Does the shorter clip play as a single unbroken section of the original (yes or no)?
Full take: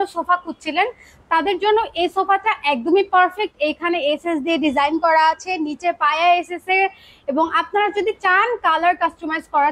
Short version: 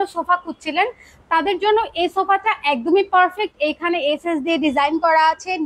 yes